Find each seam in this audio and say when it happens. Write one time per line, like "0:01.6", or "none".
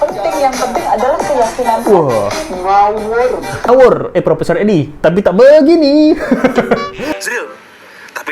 0:03.7